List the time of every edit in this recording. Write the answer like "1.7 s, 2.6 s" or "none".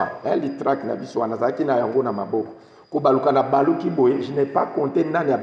none